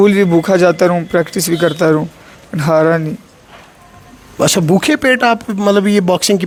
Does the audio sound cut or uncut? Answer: uncut